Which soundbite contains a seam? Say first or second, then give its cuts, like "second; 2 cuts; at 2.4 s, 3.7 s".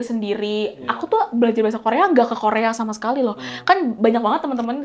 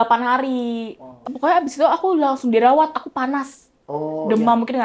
second; 1 cut; at 1.3 s